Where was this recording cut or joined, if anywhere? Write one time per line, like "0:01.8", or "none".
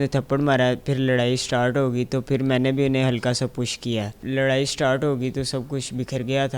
0:04.2